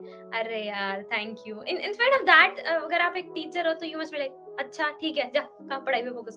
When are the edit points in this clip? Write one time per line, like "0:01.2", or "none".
none